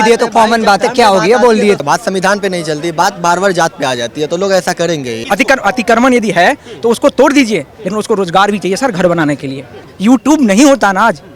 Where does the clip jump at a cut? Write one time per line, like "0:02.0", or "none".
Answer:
0:01.8
0:05.2
0:09.8